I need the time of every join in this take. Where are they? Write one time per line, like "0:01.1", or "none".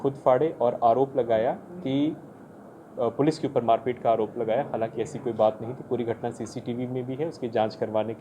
none